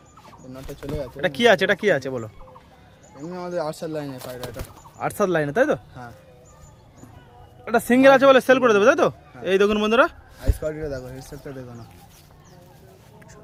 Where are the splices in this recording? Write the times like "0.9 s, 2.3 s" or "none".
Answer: none